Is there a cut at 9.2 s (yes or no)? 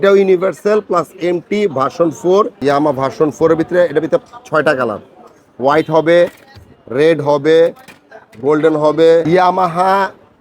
yes